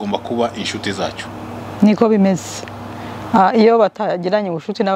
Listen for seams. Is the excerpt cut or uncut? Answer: uncut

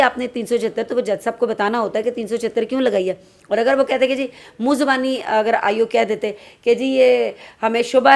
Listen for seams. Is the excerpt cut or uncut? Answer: uncut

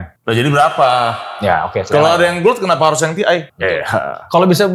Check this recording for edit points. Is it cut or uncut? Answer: cut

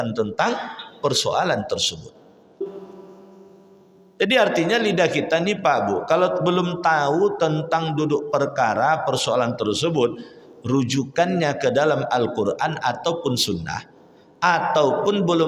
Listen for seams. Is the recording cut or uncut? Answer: cut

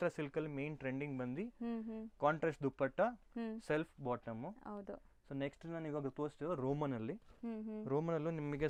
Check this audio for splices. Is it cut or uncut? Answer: uncut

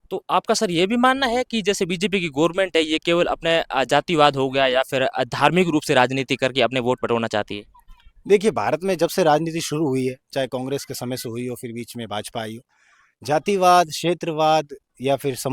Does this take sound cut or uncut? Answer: uncut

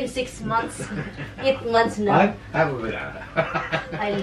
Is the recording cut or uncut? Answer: uncut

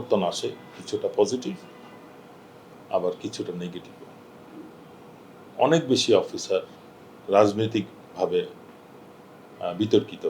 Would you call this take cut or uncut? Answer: uncut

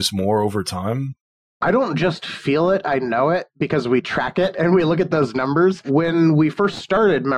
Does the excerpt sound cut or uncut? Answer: cut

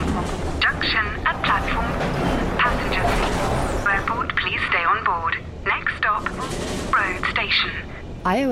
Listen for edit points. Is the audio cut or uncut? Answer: uncut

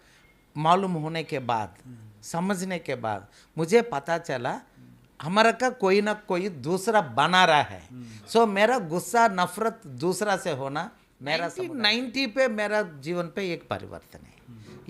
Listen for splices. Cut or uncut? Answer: cut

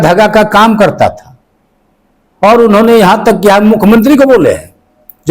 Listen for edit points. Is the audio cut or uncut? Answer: uncut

